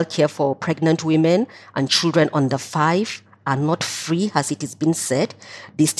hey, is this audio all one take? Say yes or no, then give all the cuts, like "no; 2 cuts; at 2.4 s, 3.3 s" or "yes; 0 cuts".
yes; 0 cuts